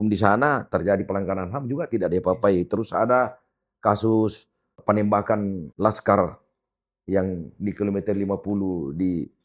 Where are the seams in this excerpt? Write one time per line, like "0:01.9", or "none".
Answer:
0:04.8
0:05.7